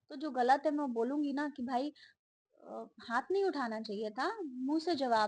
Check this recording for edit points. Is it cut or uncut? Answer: uncut